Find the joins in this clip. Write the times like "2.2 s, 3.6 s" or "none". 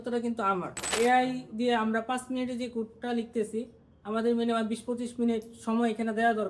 0.9 s